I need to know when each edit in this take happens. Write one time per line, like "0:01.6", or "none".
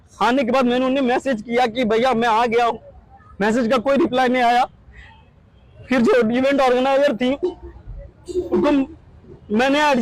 none